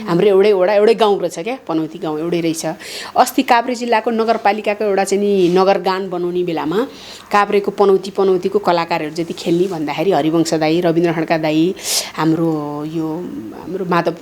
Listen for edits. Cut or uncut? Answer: uncut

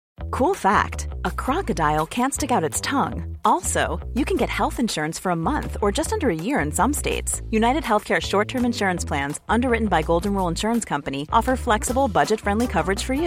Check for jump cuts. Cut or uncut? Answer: uncut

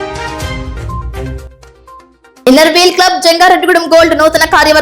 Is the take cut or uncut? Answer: cut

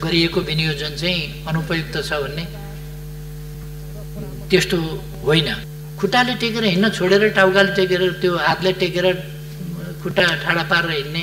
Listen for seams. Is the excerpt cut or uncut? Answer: cut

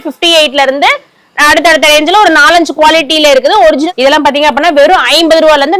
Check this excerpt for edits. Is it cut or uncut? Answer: cut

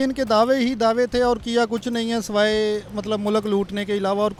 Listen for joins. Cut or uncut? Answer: uncut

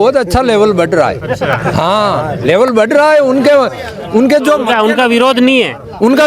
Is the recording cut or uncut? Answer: uncut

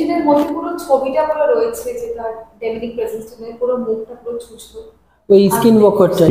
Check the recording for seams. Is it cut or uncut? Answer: uncut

